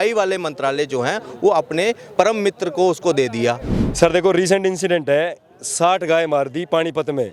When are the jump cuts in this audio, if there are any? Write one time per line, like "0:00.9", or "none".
0:03.7